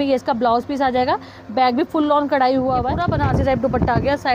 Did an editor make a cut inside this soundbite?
yes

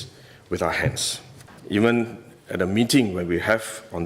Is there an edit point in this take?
yes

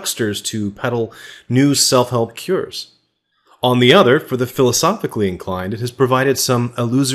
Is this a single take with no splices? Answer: yes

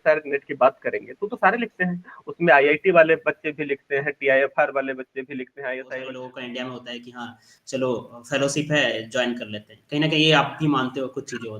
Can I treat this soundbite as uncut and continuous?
no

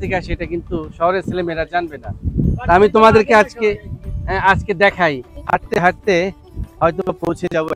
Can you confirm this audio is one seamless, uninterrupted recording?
no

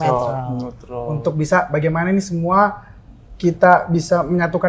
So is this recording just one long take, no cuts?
yes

